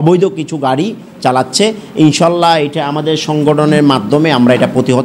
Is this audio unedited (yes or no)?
yes